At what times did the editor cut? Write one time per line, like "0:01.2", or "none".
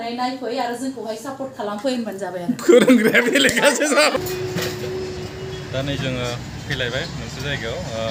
none